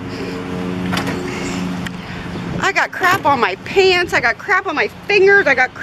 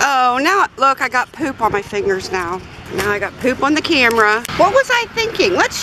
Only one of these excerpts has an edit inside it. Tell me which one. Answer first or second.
second